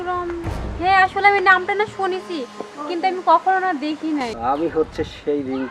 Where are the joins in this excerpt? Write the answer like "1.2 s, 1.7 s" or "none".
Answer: 4.3 s